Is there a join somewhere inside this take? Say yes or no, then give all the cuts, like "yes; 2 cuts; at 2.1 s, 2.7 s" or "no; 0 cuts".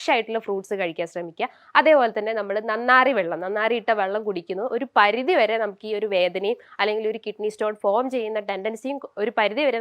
no; 0 cuts